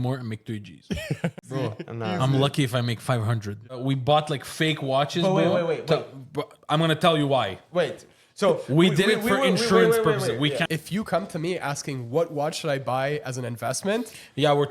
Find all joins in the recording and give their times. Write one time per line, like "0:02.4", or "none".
0:01.5
0:03.8
0:10.6